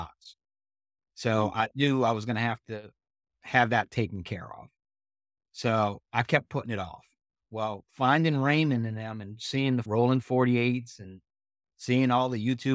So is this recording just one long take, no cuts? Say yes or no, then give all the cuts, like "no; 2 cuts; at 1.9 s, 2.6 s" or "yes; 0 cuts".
no; 1 cut; at 9.9 s